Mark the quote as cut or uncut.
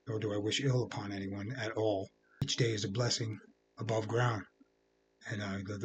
cut